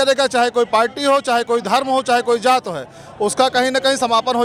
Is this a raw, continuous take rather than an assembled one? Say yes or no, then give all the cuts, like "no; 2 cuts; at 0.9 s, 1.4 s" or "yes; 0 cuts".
yes; 0 cuts